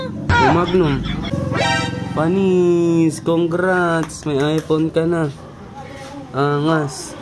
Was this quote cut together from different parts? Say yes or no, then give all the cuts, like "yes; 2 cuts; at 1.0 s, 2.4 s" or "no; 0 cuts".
yes; 1 cut; at 1.3 s